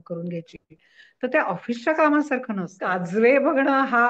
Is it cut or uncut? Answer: cut